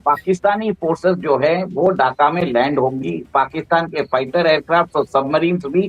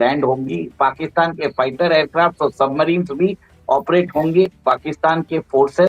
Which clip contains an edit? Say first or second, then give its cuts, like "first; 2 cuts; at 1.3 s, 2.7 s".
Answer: second; 1 cut; at 4.6 s